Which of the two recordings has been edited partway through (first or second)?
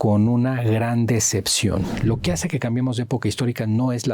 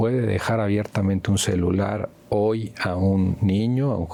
first